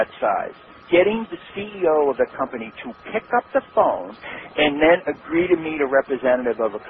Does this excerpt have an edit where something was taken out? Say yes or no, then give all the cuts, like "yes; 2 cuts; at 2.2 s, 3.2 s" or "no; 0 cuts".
yes; 1 cut; at 4.2 s